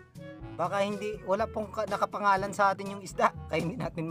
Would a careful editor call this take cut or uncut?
uncut